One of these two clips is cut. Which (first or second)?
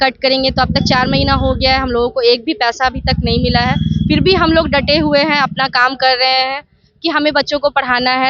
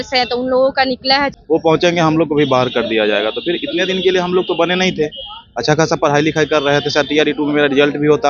second